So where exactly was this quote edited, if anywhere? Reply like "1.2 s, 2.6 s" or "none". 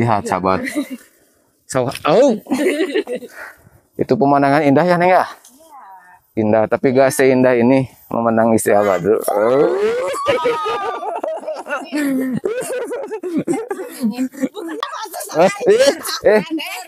14.9 s

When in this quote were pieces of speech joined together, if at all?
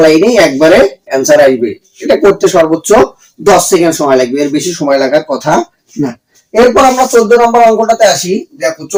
none

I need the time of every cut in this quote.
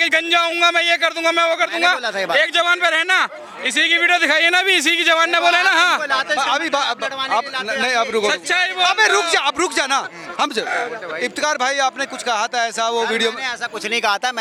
none

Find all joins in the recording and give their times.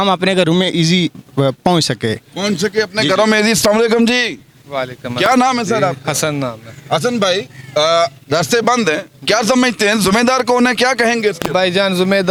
none

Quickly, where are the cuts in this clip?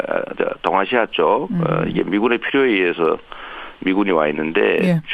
1.9 s

